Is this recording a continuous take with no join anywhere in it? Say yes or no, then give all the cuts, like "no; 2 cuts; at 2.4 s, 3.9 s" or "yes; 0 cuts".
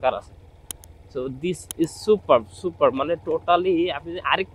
yes; 0 cuts